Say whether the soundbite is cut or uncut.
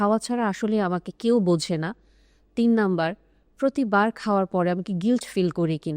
uncut